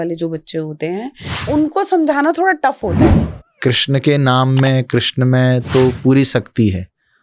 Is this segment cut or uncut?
cut